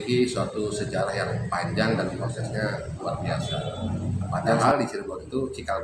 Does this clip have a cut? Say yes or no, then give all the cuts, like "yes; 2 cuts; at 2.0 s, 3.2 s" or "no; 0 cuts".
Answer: yes; 1 cut; at 4.6 s